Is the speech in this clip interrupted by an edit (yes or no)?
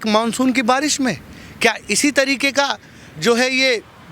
no